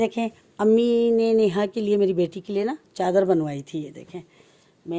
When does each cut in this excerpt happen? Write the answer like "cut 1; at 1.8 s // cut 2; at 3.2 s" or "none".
none